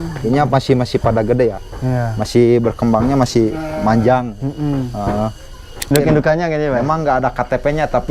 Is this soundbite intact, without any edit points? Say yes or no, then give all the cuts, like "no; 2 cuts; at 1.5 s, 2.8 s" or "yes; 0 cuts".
no; 1 cut; at 5.9 s